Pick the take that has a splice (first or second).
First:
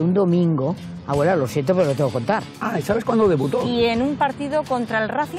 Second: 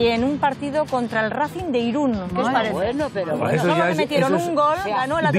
first